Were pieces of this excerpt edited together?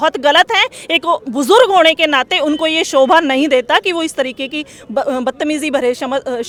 no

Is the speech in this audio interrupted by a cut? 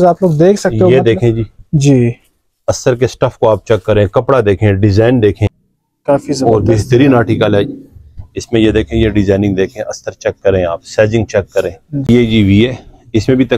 yes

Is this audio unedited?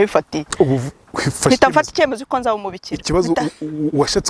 yes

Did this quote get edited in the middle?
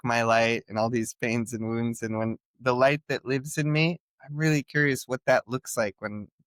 no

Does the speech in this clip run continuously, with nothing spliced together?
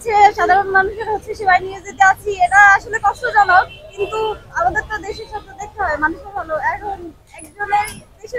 yes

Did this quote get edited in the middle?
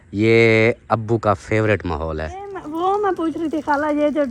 yes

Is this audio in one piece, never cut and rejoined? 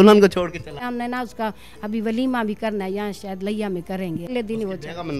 no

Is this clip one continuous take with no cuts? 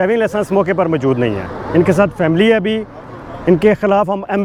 yes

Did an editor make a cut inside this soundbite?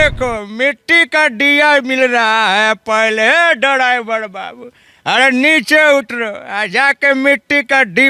no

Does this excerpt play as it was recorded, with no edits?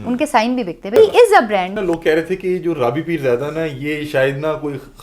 no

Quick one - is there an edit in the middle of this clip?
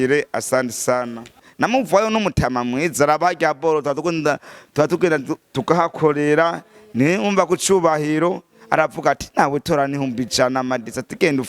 yes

